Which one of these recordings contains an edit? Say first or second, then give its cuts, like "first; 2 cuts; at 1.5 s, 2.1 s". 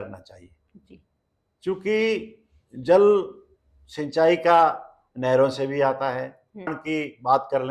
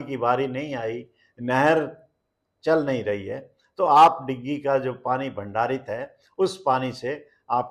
first; 1 cut; at 6.8 s